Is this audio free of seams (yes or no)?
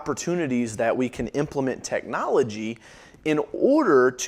yes